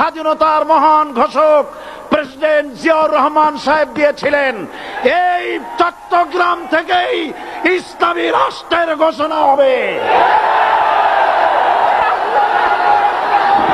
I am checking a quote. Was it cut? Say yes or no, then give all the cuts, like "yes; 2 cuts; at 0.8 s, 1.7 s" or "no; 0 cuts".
no; 0 cuts